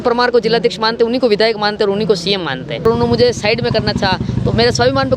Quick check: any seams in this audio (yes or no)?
yes